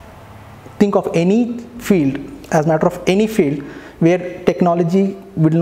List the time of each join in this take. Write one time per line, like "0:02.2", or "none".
none